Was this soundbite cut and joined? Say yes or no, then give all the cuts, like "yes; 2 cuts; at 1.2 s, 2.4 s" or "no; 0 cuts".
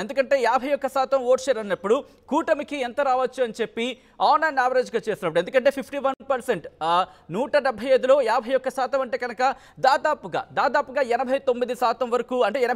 no; 0 cuts